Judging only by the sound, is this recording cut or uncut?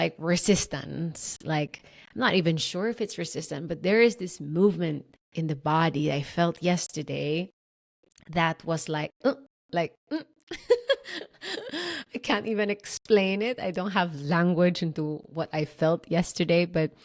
uncut